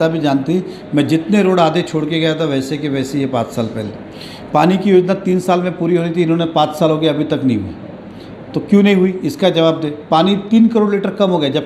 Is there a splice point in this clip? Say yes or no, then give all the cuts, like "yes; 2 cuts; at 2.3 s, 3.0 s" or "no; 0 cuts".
no; 0 cuts